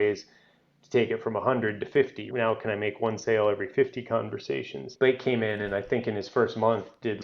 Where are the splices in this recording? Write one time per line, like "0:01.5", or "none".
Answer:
0:02.2
0:04.9